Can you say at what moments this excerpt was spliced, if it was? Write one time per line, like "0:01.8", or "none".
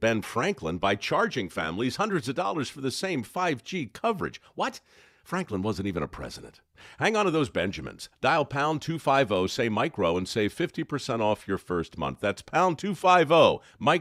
none